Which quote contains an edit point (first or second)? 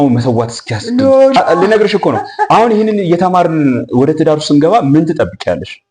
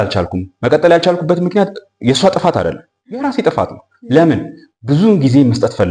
first